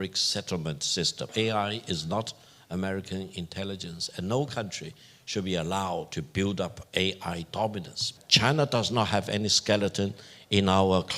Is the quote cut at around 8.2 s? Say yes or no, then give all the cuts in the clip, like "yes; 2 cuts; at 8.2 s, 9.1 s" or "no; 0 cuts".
yes; 2 cuts; at 1.3 s, 8.2 s